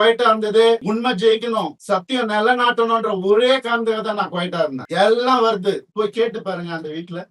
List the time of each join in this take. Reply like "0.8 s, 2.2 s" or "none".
0.8 s, 1.8 s, 4.8 s, 5.9 s